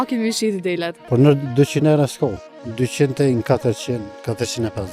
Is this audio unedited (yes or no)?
no